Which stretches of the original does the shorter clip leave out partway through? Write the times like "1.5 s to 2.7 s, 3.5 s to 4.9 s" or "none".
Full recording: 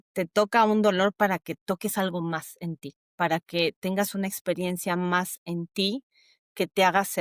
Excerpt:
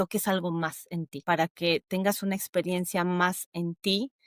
2.8 s to 3.0 s